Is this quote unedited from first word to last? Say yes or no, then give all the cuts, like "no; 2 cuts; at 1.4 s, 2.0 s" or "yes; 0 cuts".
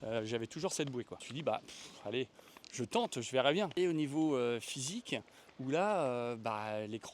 no; 2 cuts; at 1.2 s, 3.7 s